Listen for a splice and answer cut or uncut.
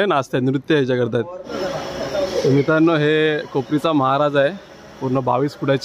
cut